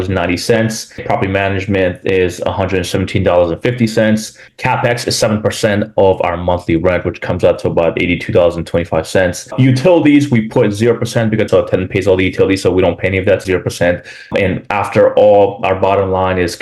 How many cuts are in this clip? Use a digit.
2